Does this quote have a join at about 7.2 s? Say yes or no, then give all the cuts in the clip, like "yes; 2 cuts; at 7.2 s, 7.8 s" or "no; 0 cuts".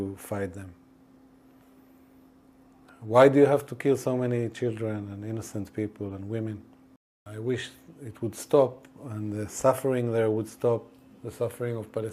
yes; 1 cut; at 7.2 s